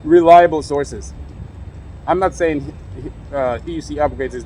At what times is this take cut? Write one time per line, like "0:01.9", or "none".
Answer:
none